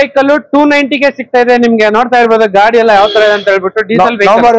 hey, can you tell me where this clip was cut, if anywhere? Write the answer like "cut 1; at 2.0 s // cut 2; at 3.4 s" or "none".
none